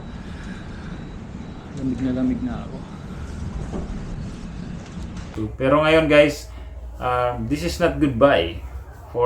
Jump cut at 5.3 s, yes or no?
yes